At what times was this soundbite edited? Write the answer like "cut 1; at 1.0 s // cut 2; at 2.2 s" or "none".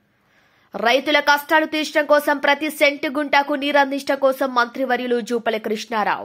none